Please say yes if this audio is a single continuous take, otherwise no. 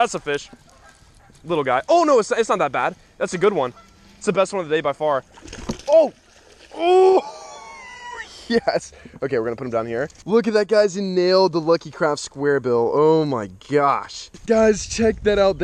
yes